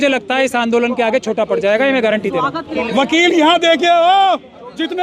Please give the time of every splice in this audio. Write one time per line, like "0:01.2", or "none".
0:02.7